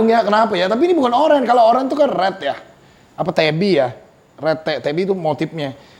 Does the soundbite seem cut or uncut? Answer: uncut